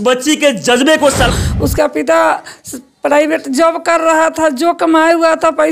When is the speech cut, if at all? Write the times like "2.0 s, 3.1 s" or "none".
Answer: 1.3 s